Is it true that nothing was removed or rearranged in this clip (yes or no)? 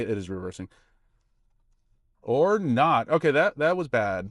yes